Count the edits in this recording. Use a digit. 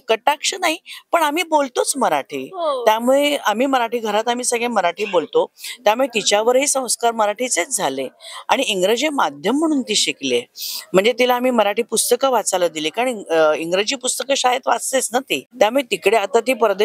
1